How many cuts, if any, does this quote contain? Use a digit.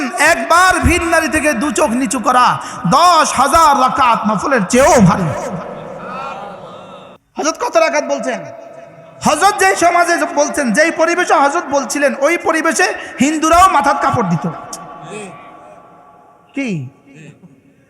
1